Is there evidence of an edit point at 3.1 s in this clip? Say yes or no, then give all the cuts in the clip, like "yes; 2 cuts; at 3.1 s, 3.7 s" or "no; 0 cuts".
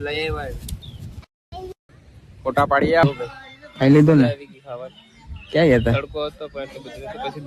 yes; 1 cut; at 3.1 s